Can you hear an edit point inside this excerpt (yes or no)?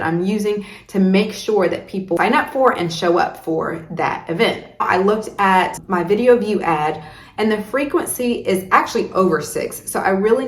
yes